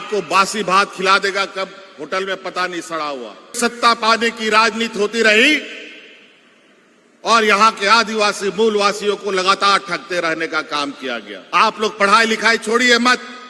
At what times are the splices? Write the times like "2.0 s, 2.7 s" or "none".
3.5 s, 11.3 s